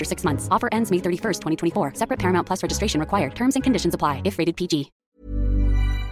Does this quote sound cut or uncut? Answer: cut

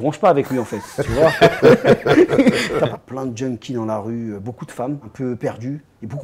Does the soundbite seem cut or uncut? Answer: cut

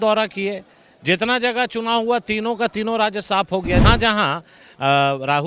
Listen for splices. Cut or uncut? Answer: cut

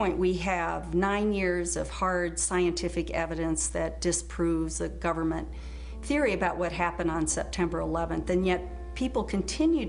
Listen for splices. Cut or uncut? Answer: uncut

